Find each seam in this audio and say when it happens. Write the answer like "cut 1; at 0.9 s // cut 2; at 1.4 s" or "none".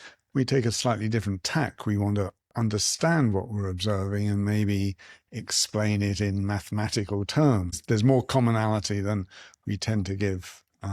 cut 1; at 7.8 s